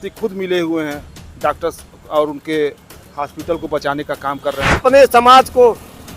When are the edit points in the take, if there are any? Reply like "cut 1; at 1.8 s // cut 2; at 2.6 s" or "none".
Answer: cut 1; at 4.8 s